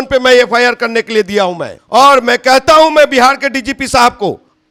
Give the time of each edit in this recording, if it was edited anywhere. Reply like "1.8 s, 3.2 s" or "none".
none